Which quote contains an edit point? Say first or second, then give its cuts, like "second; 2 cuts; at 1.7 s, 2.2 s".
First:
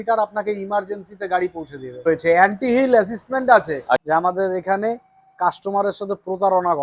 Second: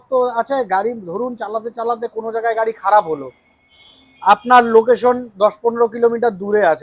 first; 2 cuts; at 2.0 s, 4.0 s